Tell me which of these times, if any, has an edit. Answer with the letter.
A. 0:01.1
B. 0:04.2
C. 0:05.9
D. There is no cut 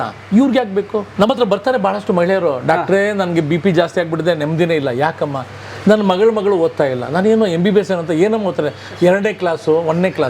A